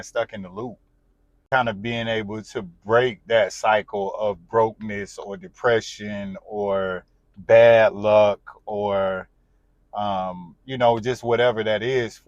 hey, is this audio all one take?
no; 1 cut; at 1.4 s

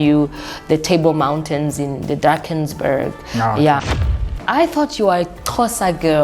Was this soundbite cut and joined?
yes; 1 cut; at 3.9 s

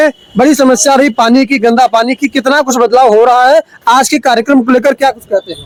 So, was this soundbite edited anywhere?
no; 0 cuts

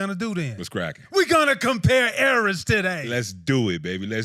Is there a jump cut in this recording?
no; 0 cuts

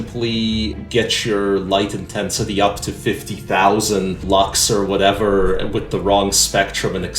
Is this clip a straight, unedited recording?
no; 2 cuts; at 0.8 s, 4.2 s

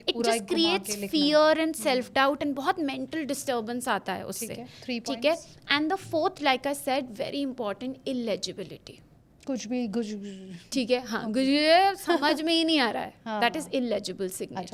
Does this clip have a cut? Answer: no; 0 cuts

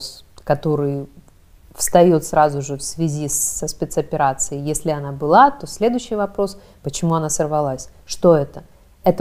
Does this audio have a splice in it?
no; 0 cuts

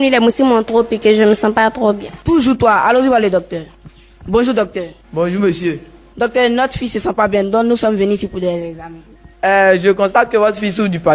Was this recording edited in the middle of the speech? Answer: no; 0 cuts

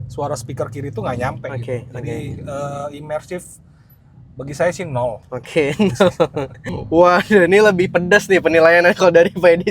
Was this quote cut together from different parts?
yes; 1 cut; at 6.7 s

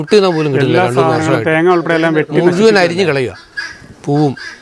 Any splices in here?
no; 0 cuts

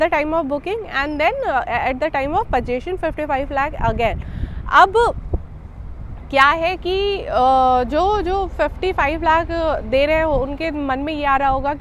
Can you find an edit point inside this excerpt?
no; 0 cuts

